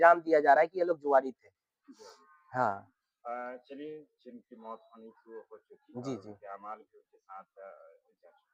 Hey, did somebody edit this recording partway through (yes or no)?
no